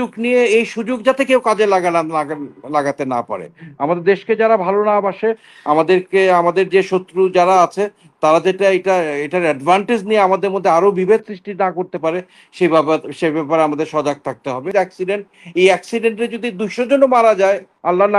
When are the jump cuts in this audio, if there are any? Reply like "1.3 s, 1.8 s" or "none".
14.6 s

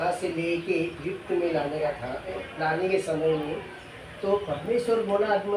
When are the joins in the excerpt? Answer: 2.4 s

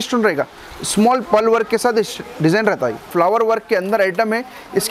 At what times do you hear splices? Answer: 3.0 s

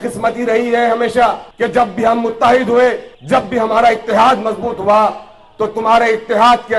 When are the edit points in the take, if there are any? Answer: 1.5 s, 3.1 s

